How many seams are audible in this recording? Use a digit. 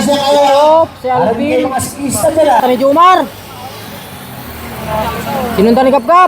1